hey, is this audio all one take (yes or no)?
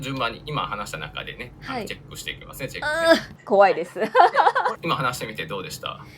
no